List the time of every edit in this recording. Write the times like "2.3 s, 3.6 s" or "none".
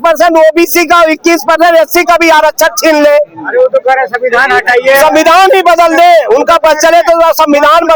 none